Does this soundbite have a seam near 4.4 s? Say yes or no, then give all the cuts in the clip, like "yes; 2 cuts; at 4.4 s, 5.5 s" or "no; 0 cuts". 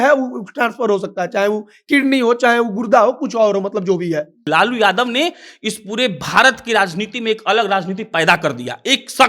yes; 1 cut; at 4.4 s